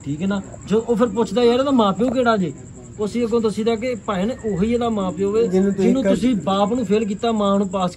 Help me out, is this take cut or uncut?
uncut